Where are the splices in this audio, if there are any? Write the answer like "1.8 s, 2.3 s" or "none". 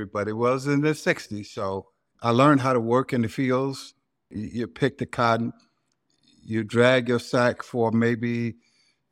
2.1 s, 4.4 s